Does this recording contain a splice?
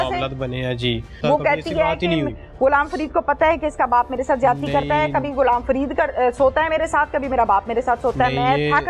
yes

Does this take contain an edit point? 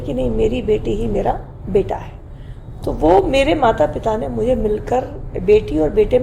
no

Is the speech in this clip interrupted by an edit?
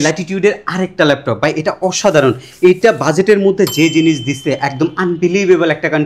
no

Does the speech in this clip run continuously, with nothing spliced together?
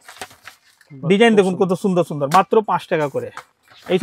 yes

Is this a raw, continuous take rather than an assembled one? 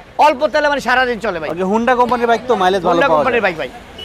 yes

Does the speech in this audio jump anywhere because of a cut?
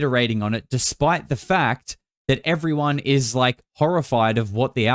no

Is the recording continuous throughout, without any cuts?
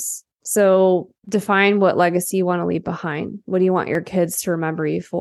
no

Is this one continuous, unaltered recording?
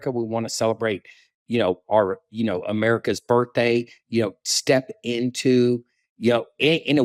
yes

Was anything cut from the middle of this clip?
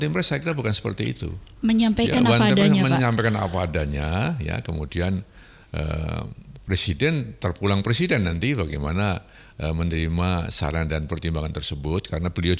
no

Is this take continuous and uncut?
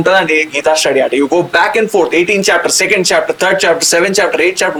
yes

